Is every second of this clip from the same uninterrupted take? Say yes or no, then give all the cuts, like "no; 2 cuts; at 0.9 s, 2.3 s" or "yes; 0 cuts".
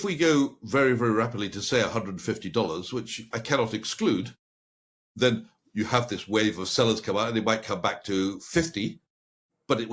yes; 0 cuts